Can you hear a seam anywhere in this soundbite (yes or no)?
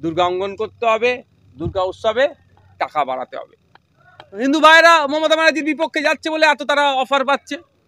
no